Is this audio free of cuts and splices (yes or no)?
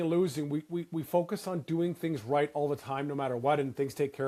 yes